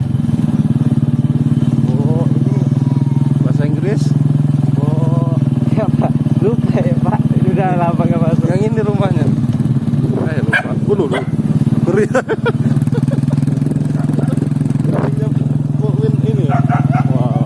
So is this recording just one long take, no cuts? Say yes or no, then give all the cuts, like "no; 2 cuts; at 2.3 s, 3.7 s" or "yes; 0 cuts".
yes; 0 cuts